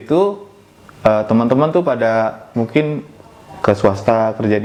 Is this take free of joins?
yes; 0 cuts

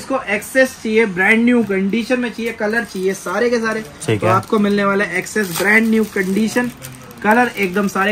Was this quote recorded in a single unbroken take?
yes; 0 cuts

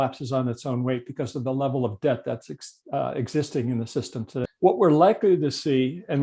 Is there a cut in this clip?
yes; 1 cut; at 4.4 s

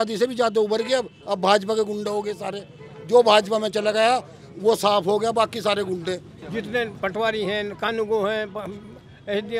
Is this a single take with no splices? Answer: no; 1 cut; at 6.4 s

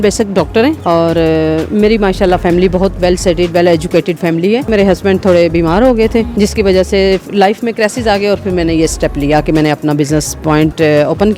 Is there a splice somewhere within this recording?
yes; 3 cuts; at 0.8 s, 4.7 s, 6.3 s

